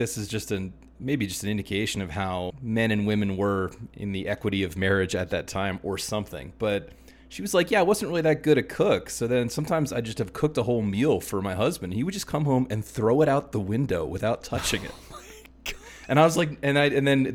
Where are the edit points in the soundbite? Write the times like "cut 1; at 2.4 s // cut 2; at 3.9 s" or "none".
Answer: cut 1; at 2.5 s